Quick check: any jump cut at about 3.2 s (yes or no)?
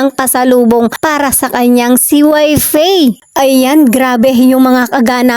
yes